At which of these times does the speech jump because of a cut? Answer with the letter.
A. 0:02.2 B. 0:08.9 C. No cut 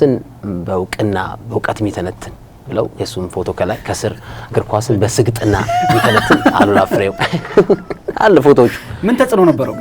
C